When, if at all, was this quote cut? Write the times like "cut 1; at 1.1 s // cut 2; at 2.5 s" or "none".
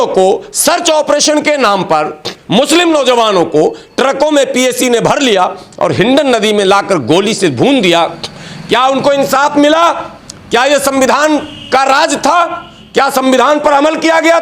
none